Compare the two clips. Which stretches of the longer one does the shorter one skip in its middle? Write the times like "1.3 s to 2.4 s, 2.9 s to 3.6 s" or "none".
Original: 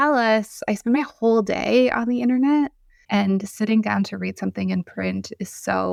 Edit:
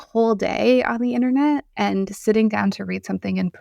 3.0 s to 3.3 s